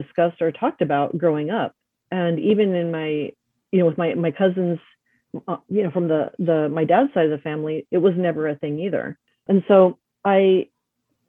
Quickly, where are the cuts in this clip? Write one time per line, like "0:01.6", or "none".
0:03.4
0:09.4
0:10.0